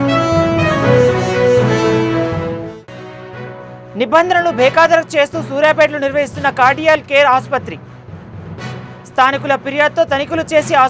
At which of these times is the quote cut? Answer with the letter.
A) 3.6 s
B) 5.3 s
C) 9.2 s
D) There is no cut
D